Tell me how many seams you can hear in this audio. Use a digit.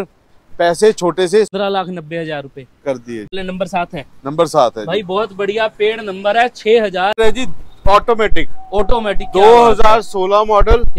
3